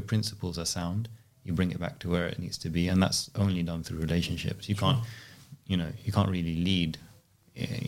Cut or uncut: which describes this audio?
uncut